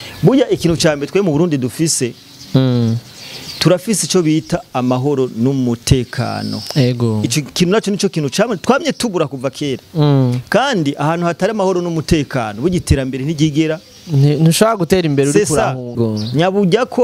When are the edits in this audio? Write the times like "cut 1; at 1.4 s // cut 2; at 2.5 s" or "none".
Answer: cut 1; at 15.9 s